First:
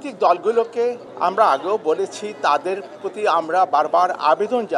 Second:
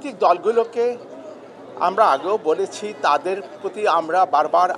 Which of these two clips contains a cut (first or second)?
first